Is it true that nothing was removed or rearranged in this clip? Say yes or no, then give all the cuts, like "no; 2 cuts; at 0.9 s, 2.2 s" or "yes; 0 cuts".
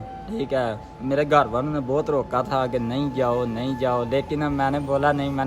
yes; 0 cuts